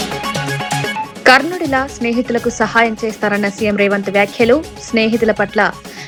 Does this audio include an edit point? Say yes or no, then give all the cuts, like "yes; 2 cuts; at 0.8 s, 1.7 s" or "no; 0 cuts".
no; 0 cuts